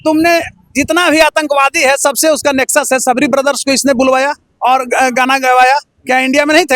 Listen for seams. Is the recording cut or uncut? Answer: uncut